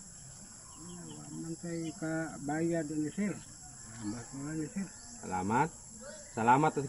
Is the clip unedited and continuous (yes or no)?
no